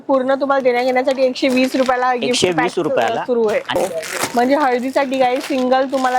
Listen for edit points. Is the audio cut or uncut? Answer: cut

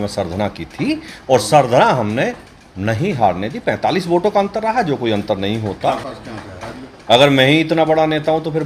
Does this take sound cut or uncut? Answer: cut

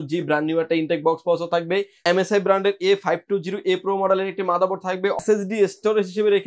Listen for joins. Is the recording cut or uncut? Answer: cut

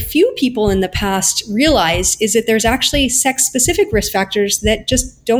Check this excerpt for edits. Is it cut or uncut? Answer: uncut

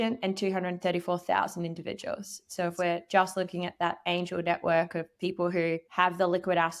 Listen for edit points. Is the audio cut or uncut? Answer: cut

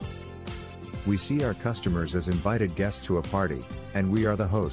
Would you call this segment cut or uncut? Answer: cut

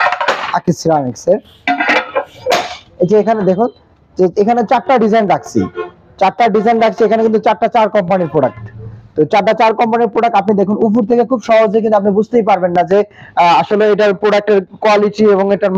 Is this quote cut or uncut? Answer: uncut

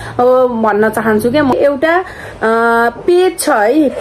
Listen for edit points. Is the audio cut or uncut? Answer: cut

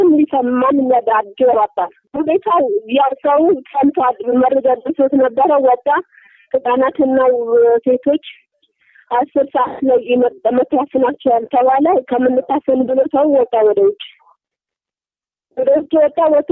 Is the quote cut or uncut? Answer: uncut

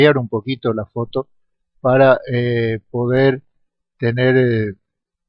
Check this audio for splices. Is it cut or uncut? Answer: cut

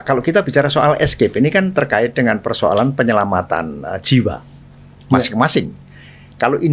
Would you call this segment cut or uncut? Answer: uncut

